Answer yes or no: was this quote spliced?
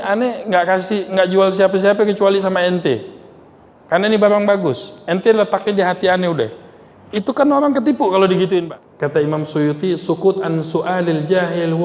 yes